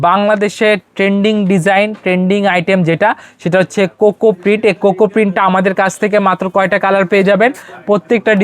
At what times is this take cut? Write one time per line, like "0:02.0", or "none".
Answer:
none